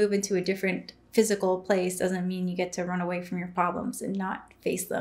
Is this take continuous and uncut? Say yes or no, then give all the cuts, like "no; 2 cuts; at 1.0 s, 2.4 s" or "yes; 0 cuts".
yes; 0 cuts